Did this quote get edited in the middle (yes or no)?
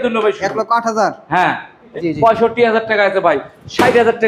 yes